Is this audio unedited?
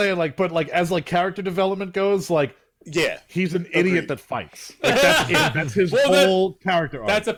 yes; 0 cuts

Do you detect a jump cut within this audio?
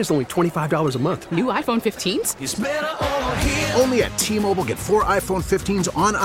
no; 0 cuts

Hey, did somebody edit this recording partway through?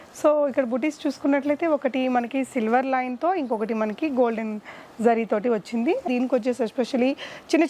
yes; 1 cut; at 6.1 s

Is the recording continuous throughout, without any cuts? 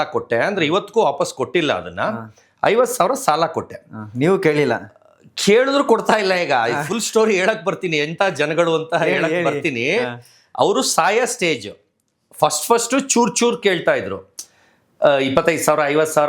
yes; 0 cuts

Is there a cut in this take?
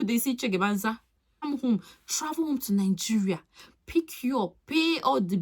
yes; 1 cut; at 1.5 s

